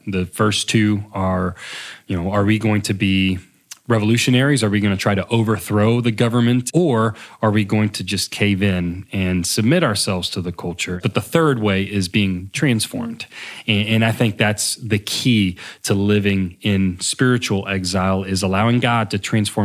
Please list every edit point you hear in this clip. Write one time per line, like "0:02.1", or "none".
0:06.7
0:11.0